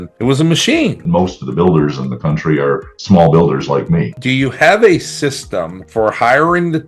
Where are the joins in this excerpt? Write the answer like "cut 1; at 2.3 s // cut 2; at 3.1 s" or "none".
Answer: cut 1; at 1.0 s // cut 2; at 4.1 s